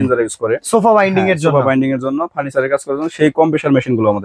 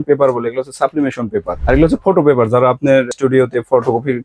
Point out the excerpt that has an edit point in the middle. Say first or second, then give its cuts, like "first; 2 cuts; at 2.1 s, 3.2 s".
second; 2 cuts; at 1.5 s, 3.1 s